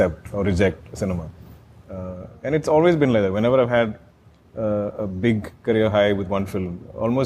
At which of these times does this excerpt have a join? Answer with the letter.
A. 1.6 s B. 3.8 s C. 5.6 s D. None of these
D